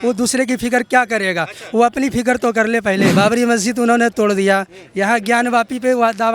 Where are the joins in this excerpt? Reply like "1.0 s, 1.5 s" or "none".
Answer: 3.1 s